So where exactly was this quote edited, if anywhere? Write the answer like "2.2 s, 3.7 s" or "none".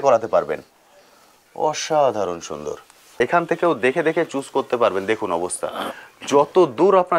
3.2 s

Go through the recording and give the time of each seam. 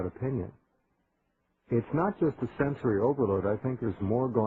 3.3 s

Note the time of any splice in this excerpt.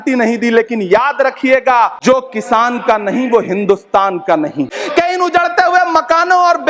2.0 s, 4.8 s

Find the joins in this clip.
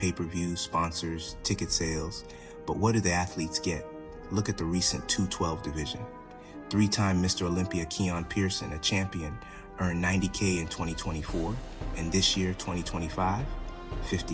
none

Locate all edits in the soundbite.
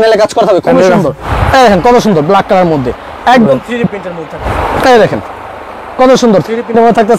1.3 s, 4.4 s

